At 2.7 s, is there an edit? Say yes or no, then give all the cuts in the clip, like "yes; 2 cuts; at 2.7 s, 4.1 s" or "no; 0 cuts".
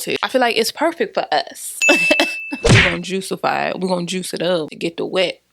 yes; 1 cut; at 2.7 s